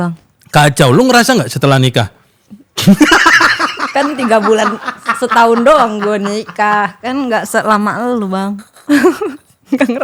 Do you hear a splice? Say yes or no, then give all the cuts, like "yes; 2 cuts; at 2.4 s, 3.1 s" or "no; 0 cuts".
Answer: no; 0 cuts